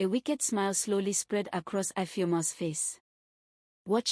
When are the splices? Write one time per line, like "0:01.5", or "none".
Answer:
none